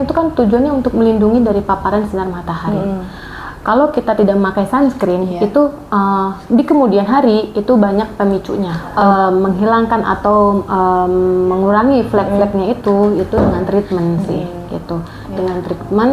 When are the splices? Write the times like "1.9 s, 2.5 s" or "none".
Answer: 8.8 s